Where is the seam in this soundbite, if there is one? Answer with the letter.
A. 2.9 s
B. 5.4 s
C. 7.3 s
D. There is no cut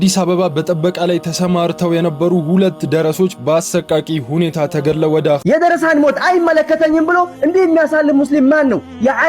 B